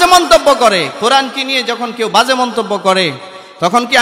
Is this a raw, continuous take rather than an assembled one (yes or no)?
yes